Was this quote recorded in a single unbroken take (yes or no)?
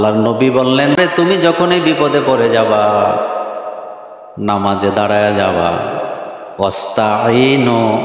no